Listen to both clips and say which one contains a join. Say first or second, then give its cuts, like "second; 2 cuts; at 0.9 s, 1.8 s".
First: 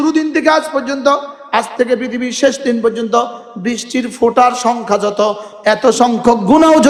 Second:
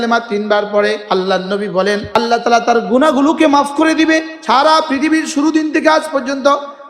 second; 3 cuts; at 1.0 s, 2.1 s, 4.3 s